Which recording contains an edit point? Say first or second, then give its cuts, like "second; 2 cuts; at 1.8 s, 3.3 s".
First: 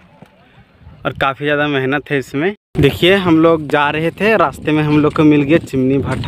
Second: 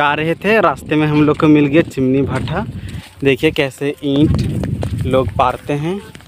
first; 1 cut; at 2.6 s